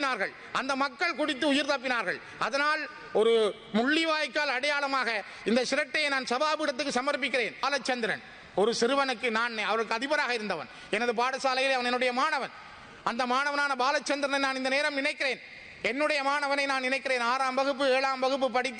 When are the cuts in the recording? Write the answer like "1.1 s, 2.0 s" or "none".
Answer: 7.6 s